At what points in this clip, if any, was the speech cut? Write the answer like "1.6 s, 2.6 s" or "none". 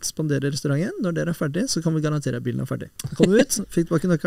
3.0 s